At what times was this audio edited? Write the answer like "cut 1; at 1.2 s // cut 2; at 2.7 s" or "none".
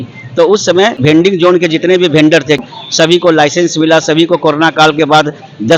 cut 1; at 1.1 s // cut 2; at 2.6 s